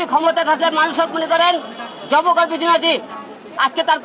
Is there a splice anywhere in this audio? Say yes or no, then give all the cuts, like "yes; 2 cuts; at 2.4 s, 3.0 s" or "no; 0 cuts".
no; 0 cuts